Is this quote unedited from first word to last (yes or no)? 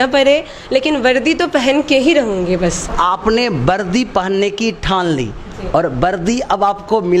yes